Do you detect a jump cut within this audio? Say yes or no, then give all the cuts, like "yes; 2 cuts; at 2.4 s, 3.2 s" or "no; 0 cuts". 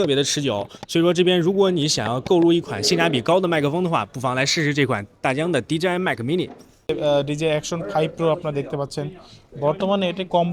yes; 1 cut; at 6.9 s